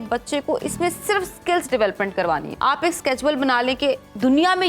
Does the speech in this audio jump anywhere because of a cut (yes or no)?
yes